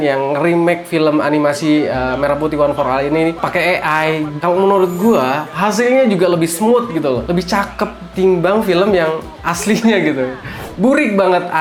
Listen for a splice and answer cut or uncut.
uncut